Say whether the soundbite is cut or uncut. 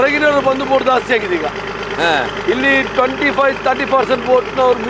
uncut